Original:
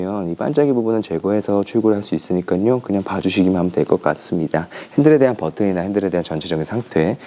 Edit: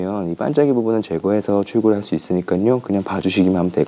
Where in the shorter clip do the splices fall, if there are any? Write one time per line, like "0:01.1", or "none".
none